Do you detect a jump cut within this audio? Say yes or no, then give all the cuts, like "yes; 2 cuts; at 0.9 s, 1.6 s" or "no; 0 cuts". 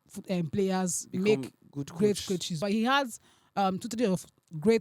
yes; 1 cut; at 2.6 s